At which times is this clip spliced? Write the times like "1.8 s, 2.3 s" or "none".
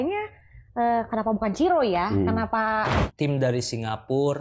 3.1 s